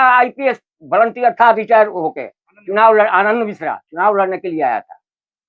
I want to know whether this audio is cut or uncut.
uncut